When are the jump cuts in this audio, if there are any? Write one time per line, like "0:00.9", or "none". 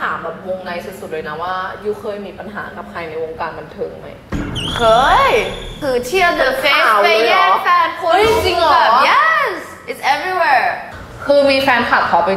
0:05.8
0:10.9